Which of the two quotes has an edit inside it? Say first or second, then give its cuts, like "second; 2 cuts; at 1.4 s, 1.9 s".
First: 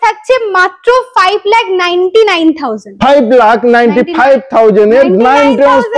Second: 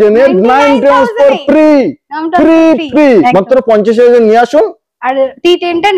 second; 1 cut; at 3.3 s